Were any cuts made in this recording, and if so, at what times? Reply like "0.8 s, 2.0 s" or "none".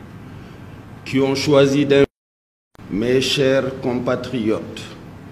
2.1 s